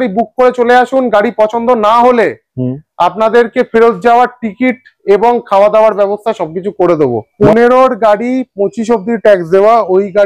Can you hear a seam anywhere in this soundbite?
yes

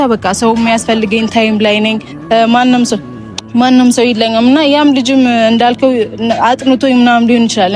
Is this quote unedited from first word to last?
yes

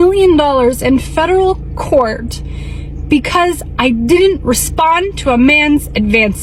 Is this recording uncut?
yes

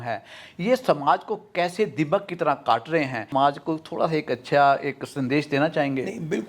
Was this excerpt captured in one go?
no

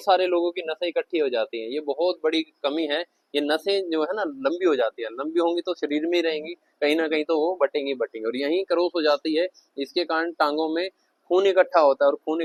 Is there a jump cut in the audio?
no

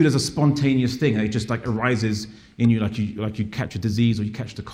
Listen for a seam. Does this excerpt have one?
no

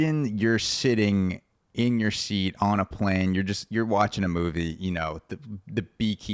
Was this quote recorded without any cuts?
yes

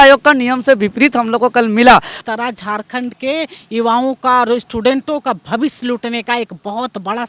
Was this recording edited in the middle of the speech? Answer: yes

